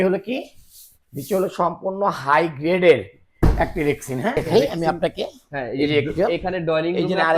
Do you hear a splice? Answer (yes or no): yes